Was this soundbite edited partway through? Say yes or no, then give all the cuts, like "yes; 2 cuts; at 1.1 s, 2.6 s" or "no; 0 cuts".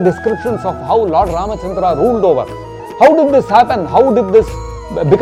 no; 0 cuts